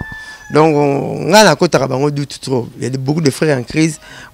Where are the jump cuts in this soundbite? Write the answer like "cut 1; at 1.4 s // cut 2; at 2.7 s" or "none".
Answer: none